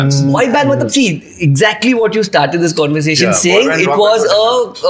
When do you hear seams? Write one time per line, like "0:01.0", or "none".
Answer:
none